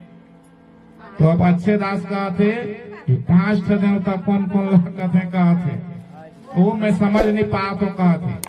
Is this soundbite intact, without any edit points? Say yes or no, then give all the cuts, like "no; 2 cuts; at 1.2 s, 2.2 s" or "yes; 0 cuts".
yes; 0 cuts